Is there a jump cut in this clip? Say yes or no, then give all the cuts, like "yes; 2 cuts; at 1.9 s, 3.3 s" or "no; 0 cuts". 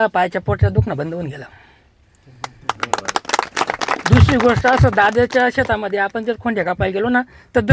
no; 0 cuts